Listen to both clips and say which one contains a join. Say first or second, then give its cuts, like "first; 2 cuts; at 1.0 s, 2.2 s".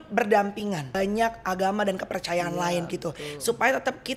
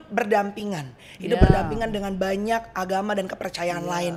first; 1 cut; at 0.9 s